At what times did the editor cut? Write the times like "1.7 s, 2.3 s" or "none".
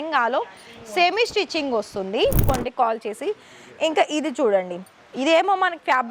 2.4 s

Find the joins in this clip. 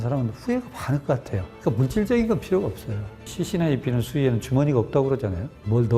1.5 s, 3.3 s

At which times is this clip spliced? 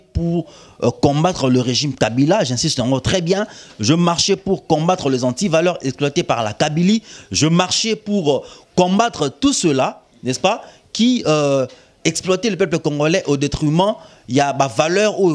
none

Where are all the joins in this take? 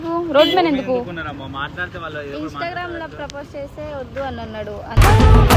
none

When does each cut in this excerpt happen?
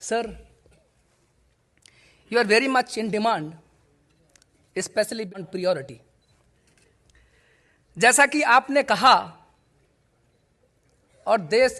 5.3 s

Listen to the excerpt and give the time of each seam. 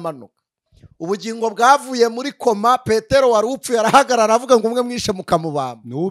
none

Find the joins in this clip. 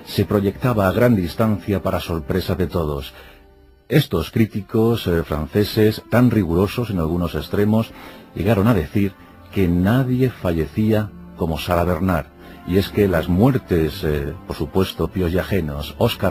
none

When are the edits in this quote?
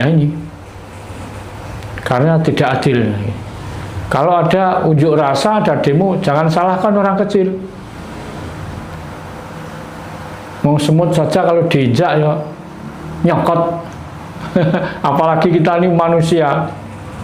none

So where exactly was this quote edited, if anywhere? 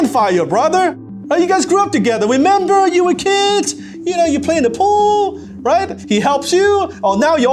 1.1 s

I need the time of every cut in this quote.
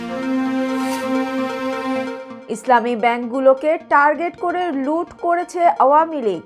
none

